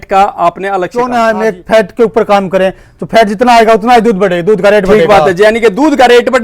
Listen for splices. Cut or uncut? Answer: cut